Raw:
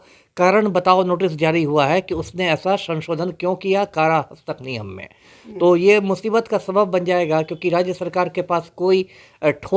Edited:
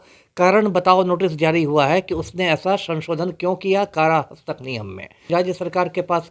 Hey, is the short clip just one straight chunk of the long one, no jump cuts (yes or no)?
no